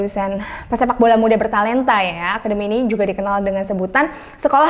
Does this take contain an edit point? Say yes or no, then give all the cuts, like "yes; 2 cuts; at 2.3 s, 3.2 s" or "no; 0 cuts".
no; 0 cuts